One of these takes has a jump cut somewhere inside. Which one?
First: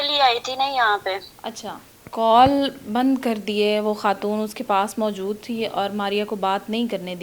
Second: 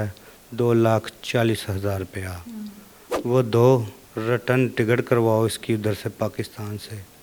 first; 1 cut; at 2.1 s

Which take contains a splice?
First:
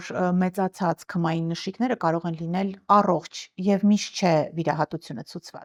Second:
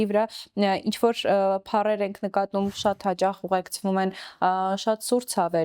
second; 1 cut; at 2.7 s

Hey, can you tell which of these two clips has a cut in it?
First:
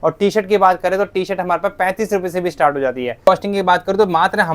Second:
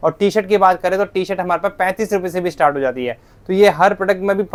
first; 1 cut; at 3.3 s

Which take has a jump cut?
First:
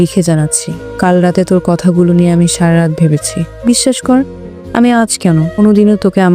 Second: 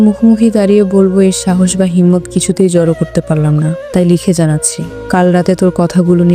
first; 1 cut; at 3.5 s

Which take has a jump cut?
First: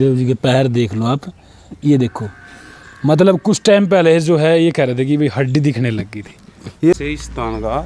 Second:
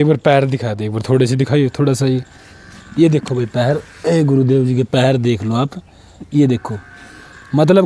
first; 1 cut; at 6.9 s

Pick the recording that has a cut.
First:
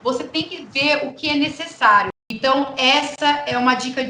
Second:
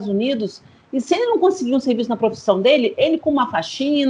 first; 1 cut; at 2.2 s

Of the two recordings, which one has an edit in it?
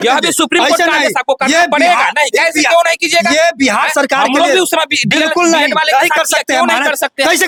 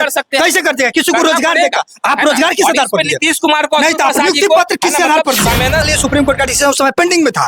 second; 1 cut; at 5.9 s

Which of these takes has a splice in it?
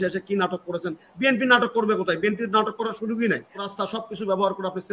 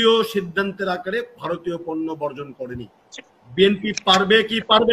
first; 1 cut; at 3.6 s

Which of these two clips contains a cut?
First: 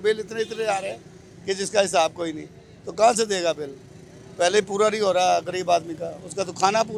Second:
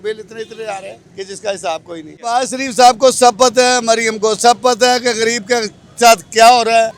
second; 2 cuts; at 1.0 s, 2.3 s

